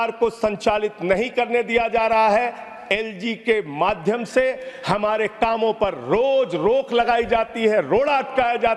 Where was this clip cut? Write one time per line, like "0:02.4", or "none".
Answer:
none